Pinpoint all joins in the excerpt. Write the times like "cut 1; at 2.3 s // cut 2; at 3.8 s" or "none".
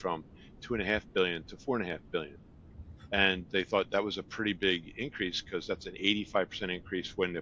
none